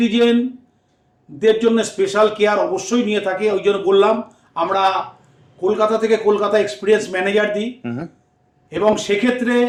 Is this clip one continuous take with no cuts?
yes; 0 cuts

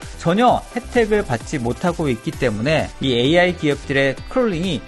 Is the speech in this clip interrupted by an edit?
yes; 1 cut; at 2.9 s

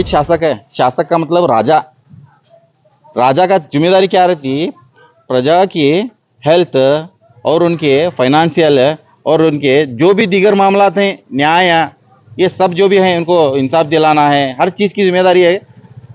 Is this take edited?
no; 0 cuts

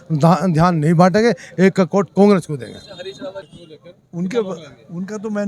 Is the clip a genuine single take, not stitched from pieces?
no; 1 cut; at 3.5 s

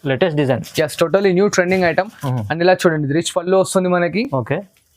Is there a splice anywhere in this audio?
no; 0 cuts

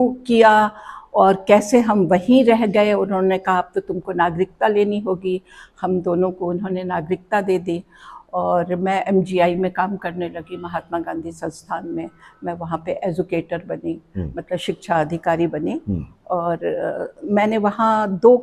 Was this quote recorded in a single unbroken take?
yes; 0 cuts

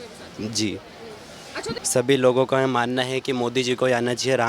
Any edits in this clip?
yes; 1 cut; at 1.7 s

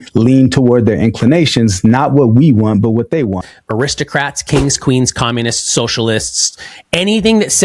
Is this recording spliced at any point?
yes; 1 cut; at 3.4 s

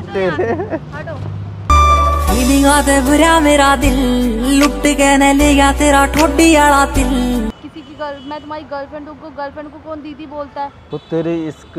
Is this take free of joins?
no; 2 cuts; at 7.6 s, 10.8 s

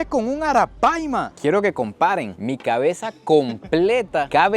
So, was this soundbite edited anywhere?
yes; 1 cut; at 1.3 s

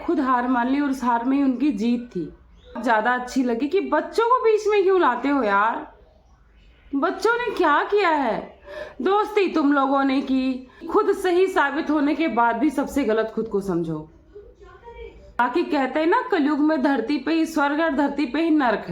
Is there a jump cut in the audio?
yes; 3 cuts; at 2.8 s, 10.9 s, 15.4 s

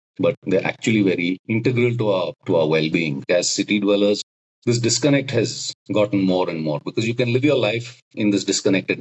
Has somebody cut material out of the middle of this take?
yes; 3 cuts; at 1.4 s, 2.3 s, 3.2 s

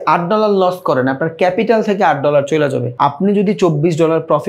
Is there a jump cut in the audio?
yes; 1 cut; at 2.9 s

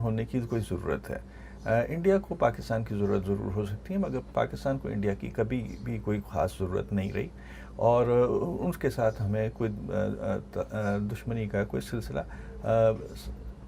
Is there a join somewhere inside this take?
no; 0 cuts

